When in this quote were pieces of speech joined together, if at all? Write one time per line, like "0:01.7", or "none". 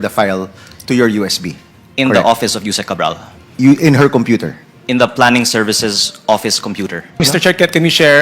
0:07.2